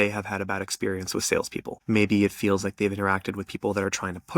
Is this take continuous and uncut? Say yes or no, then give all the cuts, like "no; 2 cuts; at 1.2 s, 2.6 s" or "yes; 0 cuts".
no; 1 cut; at 1.7 s